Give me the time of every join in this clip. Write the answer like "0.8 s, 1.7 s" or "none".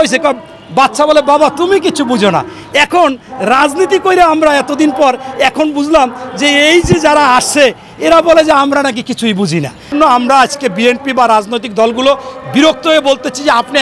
9.9 s